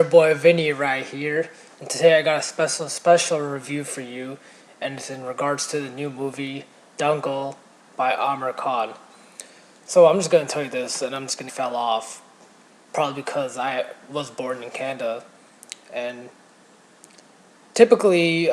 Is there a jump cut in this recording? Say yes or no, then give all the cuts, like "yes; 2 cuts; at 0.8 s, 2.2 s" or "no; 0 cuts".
no; 0 cuts